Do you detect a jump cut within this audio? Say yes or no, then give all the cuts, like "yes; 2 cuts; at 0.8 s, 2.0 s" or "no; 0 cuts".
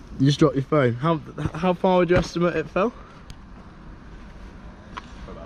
no; 0 cuts